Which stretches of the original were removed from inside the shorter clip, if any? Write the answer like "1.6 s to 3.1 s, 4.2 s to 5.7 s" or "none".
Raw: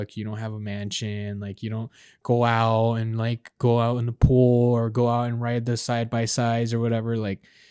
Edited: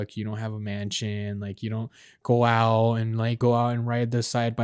3.4 s to 4.9 s